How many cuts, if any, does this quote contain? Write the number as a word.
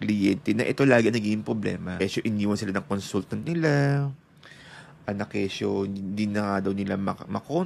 one